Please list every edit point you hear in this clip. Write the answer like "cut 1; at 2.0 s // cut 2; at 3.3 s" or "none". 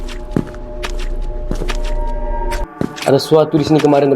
cut 1; at 2.8 s

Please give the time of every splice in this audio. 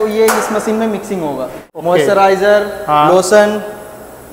cut 1; at 1.6 s

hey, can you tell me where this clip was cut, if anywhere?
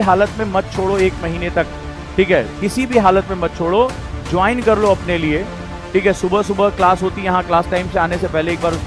none

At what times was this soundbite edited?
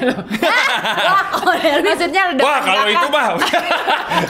none

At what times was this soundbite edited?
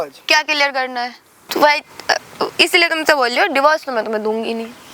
cut 1; at 1.3 s

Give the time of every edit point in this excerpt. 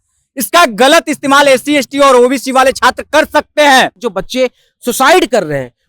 cut 1; at 4.0 s

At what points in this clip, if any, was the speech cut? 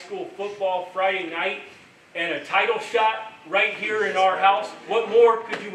none

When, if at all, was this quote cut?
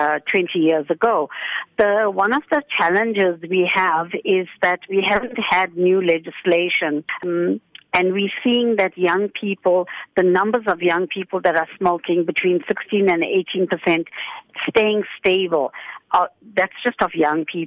cut 1; at 7.2 s

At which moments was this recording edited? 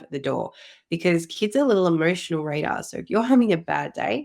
none

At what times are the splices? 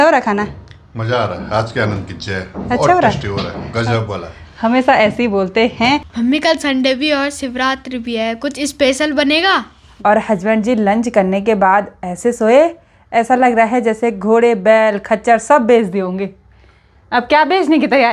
cut 1; at 6.1 s // cut 2; at 9.8 s

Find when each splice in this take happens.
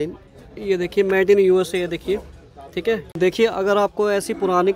cut 1; at 3.1 s

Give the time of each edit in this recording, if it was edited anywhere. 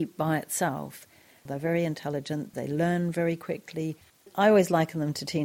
cut 1; at 1.5 s // cut 2; at 2.5 s // cut 3; at 4.2 s

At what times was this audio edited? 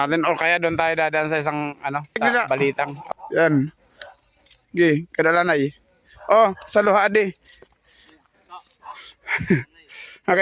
cut 1; at 3.0 s

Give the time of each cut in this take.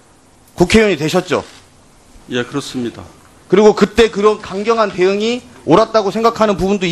cut 1; at 4.1 s

